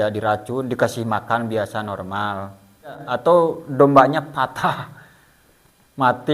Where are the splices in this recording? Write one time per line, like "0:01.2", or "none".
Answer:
0:03.1